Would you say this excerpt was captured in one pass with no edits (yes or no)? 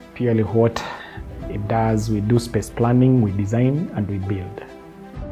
yes